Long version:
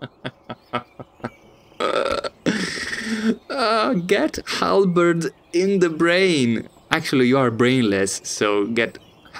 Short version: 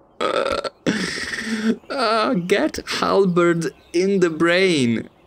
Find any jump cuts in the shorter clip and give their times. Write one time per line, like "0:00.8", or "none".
none